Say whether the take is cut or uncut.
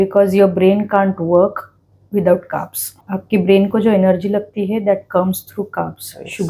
cut